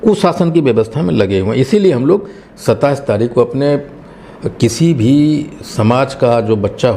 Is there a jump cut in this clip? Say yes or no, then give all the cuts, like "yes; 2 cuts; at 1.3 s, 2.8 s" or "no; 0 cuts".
no; 0 cuts